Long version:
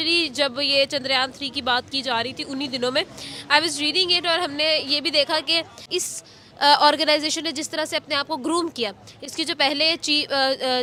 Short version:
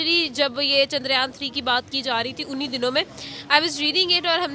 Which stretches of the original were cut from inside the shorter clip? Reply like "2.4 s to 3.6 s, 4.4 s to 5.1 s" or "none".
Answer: none

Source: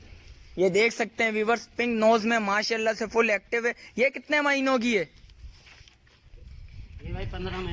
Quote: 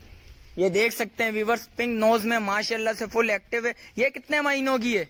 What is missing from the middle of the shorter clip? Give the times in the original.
none

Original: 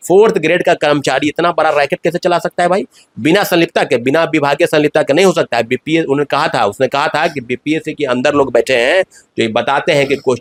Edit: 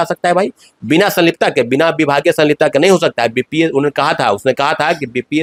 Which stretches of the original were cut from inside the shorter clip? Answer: none

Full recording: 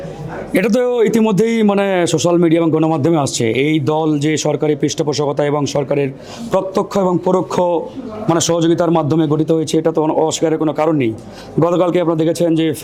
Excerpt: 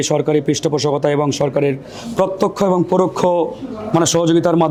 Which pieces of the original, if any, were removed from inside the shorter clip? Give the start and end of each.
none

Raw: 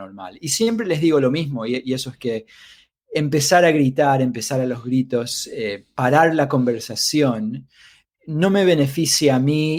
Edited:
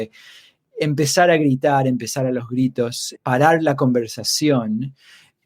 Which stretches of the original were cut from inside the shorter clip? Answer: 5.4 s to 5.8 s

